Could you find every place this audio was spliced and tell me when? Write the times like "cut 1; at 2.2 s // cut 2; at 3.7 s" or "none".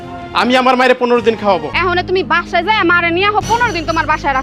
cut 1; at 1.7 s